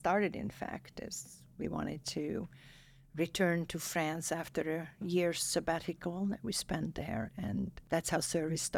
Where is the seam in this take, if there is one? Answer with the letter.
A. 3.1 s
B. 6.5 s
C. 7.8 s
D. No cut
C